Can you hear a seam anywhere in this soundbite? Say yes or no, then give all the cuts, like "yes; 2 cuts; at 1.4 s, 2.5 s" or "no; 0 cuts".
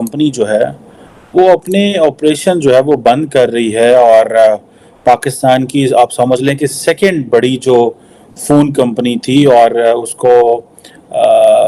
no; 0 cuts